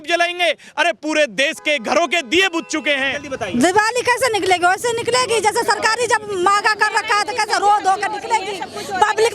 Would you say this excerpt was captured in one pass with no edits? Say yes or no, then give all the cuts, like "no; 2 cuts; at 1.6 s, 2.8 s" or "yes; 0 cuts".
no; 1 cut; at 3.3 s